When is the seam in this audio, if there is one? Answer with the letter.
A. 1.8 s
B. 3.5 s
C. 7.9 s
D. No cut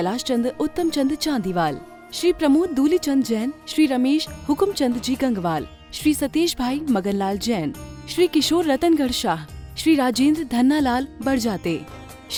D